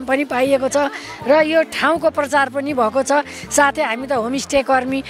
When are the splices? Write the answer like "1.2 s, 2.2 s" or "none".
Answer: none